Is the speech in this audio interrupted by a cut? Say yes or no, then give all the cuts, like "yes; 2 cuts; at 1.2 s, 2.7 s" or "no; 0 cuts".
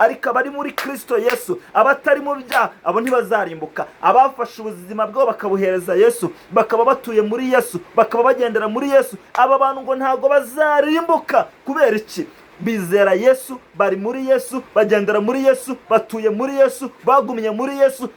no; 0 cuts